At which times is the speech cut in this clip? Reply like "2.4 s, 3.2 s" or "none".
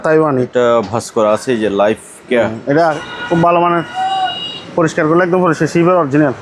3.0 s